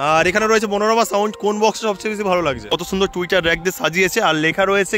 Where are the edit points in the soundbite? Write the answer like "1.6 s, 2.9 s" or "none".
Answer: 2.7 s